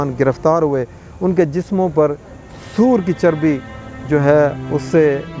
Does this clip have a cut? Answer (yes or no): no